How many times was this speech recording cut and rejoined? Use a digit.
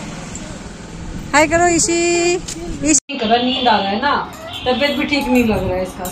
1